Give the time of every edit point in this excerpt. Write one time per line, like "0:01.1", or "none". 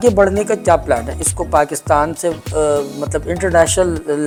none